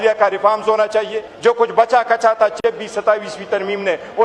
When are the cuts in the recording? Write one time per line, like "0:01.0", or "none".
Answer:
0:01.2